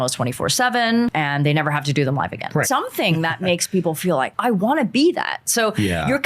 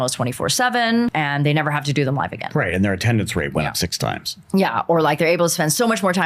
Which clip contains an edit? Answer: first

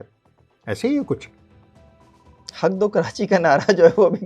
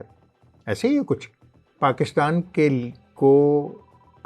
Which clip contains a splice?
second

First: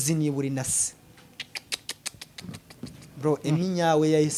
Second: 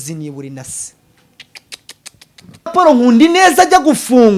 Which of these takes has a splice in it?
second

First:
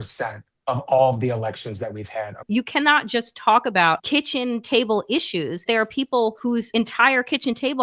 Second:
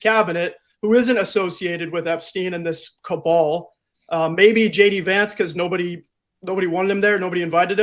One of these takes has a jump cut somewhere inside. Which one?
first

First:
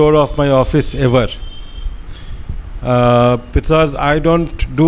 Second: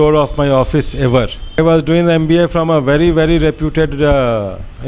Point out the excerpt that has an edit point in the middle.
second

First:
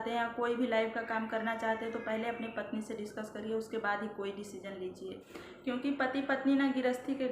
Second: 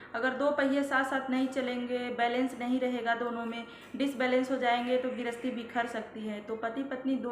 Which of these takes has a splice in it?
first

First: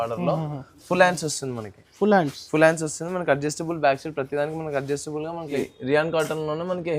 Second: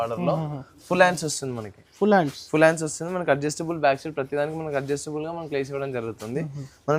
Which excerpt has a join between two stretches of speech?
first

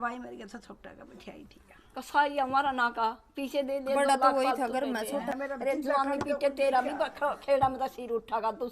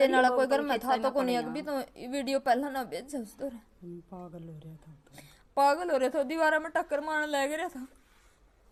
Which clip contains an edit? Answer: first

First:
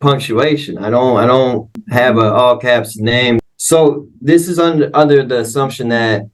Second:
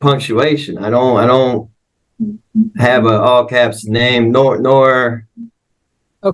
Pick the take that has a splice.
first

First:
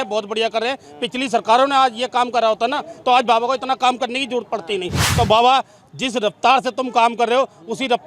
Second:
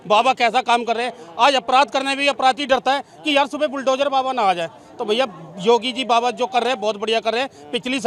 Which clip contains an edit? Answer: first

